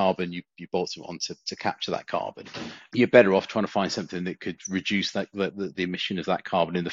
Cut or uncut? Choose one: uncut